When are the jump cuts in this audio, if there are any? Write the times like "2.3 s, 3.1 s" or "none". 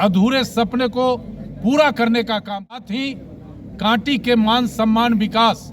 2.9 s

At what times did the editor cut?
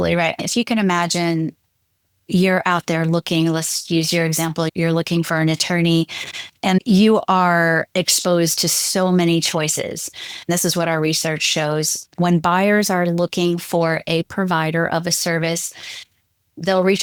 none

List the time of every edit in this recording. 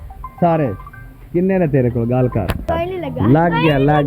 2.7 s

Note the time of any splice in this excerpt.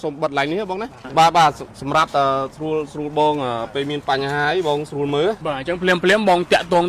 0.9 s, 5.4 s

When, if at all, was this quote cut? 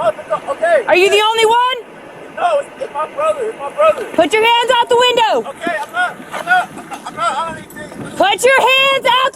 4.0 s

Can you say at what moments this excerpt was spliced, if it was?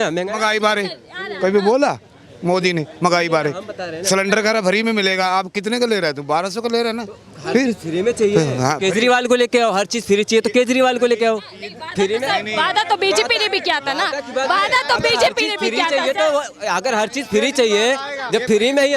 none

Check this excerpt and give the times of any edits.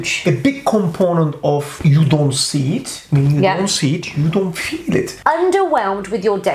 1.7 s, 5.1 s

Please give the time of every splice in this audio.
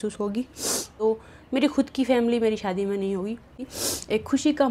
0.9 s, 3.6 s

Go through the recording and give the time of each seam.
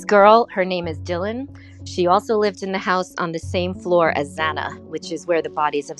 none

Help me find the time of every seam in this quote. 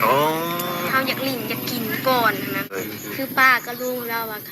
2.7 s

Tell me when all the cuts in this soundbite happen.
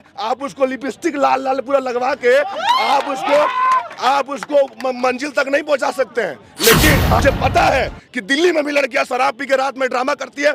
7.2 s

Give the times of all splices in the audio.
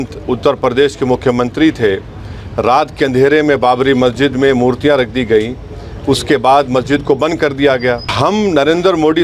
8.1 s

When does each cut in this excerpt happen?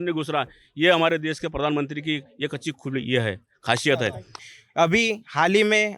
4.4 s

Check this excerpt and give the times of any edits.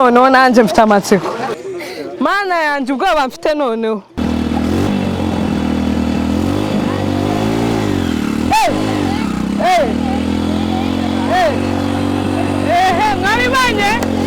none

